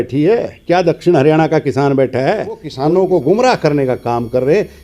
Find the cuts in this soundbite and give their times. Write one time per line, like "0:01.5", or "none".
0:02.7